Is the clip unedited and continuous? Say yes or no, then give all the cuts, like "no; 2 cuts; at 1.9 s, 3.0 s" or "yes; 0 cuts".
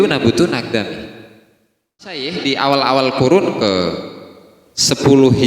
no; 1 cut; at 2.3 s